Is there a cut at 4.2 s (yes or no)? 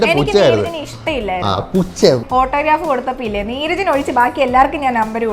no